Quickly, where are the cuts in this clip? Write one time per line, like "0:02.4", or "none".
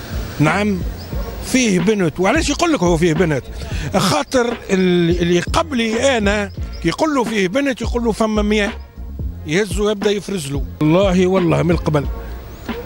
0:10.8